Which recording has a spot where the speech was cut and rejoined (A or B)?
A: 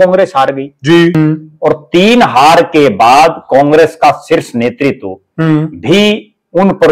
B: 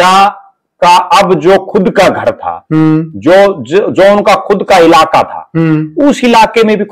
A